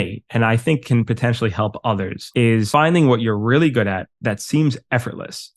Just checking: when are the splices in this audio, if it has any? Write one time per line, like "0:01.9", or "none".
0:02.5